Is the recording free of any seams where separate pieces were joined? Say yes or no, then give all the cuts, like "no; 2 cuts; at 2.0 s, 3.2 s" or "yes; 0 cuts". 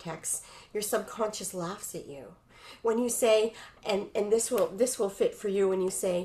yes; 0 cuts